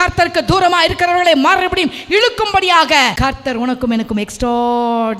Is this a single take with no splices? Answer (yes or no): no